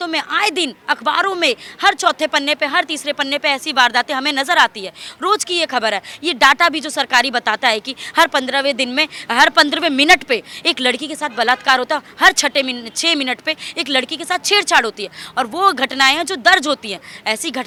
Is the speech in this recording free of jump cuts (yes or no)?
yes